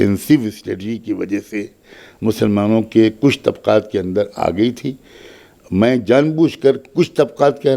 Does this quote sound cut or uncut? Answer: uncut